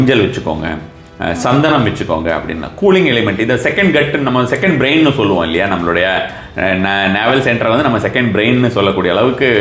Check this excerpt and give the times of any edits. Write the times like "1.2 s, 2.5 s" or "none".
none